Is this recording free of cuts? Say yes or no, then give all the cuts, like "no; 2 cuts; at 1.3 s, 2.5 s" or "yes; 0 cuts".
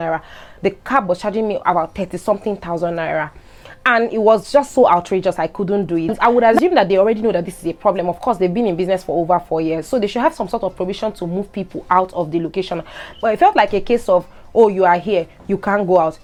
yes; 0 cuts